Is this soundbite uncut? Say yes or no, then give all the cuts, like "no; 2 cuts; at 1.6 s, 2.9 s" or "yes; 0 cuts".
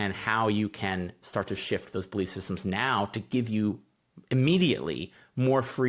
yes; 0 cuts